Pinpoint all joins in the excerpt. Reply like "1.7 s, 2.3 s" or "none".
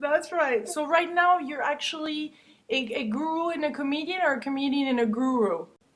1.8 s